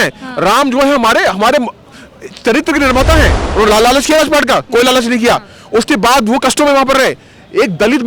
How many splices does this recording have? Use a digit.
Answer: 1